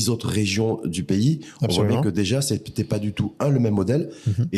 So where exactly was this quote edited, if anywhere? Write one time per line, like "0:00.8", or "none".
none